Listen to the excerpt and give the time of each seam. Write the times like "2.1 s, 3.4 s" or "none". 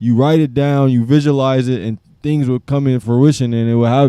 3.0 s